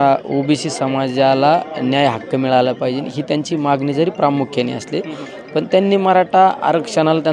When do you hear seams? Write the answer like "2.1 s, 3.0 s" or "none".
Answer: none

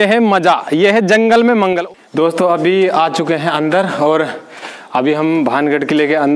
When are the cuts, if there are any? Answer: 1.8 s

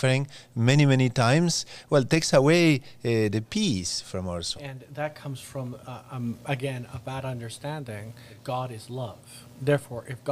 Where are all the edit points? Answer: 4.8 s, 8.3 s

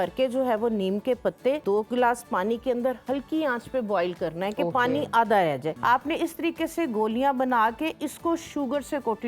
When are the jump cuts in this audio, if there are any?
1.6 s, 5.7 s

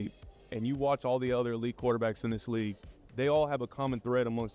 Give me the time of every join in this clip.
3.5 s

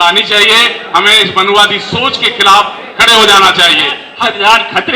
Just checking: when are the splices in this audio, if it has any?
4.1 s

